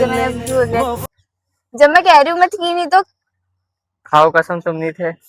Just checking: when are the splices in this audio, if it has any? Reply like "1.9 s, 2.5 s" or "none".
1.0 s